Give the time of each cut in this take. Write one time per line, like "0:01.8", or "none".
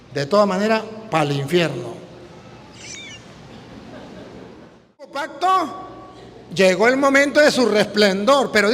0:05.2